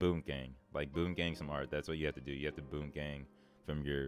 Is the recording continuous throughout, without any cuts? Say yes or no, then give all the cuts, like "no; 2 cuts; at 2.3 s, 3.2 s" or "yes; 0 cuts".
yes; 0 cuts